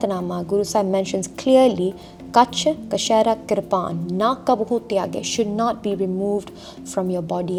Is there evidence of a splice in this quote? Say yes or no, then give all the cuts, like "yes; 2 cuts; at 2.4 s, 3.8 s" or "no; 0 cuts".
no; 0 cuts